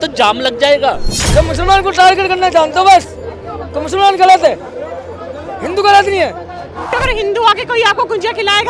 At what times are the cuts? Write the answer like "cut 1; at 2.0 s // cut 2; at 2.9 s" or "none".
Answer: cut 1; at 1.1 s // cut 2; at 7.0 s